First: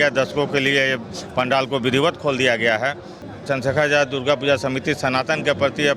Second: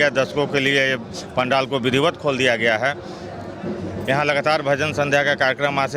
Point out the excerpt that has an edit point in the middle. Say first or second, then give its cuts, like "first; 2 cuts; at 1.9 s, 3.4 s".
first; 1 cut; at 3.3 s